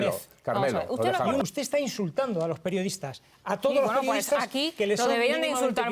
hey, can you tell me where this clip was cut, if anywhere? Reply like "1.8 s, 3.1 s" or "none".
1.4 s